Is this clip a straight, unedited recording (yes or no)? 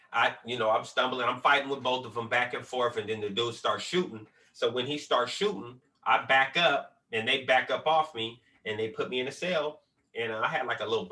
yes